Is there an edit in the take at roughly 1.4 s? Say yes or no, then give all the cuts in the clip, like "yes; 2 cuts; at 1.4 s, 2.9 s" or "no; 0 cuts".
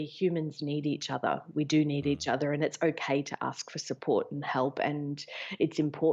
no; 0 cuts